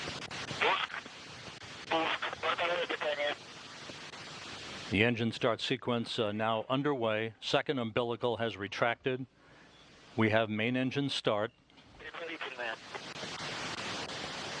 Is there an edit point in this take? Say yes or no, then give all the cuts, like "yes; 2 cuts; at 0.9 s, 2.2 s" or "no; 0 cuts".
no; 0 cuts